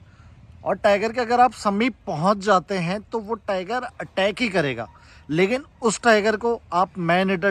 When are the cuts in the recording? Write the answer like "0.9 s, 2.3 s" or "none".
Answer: none